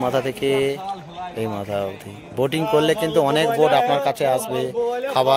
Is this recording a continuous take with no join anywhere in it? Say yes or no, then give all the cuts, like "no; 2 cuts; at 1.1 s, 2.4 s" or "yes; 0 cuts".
yes; 0 cuts